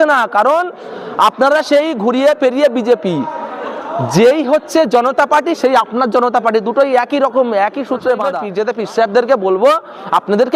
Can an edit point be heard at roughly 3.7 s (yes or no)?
no